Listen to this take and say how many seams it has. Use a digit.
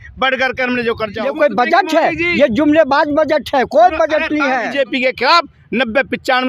2